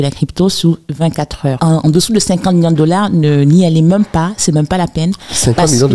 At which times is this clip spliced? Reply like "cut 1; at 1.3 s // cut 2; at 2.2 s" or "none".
cut 1; at 1.6 s